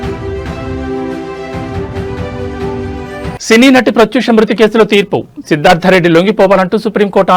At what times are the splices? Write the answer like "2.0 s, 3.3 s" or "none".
2.8 s